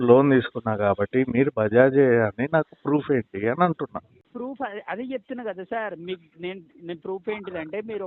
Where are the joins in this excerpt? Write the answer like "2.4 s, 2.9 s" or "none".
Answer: 4.2 s